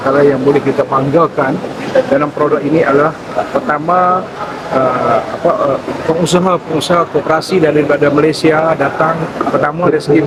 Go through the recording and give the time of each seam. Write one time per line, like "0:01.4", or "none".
none